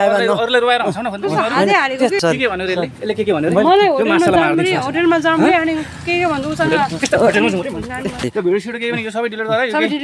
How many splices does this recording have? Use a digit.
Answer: 2